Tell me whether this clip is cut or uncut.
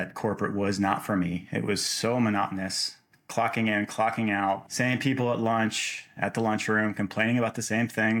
cut